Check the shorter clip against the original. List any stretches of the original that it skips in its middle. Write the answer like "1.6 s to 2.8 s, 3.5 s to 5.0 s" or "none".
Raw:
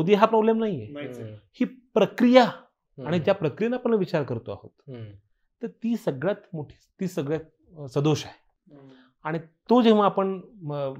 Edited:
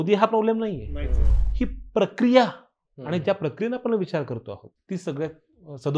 4.7 s to 6.8 s